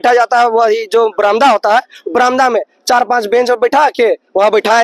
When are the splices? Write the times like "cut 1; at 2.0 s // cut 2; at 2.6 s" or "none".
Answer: none